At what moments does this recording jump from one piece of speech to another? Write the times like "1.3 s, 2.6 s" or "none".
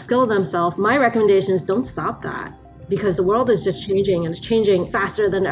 4.4 s